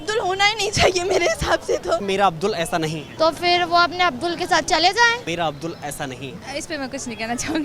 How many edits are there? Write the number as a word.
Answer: four